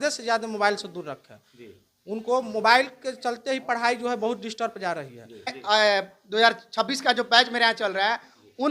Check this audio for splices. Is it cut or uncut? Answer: cut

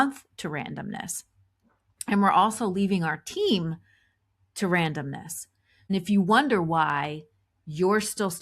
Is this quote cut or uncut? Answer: cut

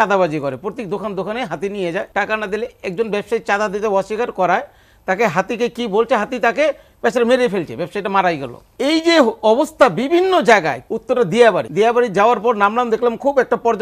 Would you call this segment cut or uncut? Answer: cut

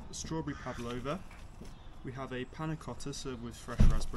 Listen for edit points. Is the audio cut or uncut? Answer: uncut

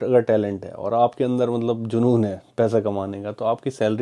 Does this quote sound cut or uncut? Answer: uncut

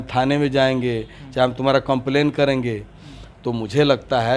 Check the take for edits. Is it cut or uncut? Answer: uncut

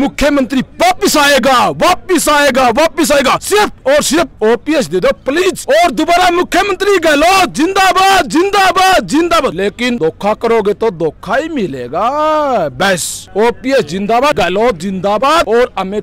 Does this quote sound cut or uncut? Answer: uncut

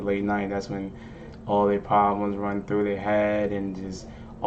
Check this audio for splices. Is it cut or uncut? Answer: uncut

